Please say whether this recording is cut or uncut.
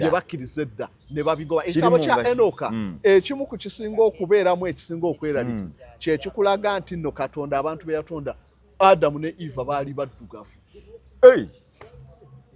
uncut